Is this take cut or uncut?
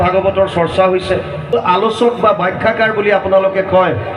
cut